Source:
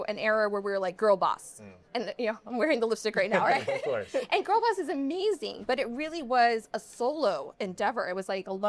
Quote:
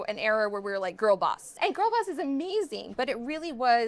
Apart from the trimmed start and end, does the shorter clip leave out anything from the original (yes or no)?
yes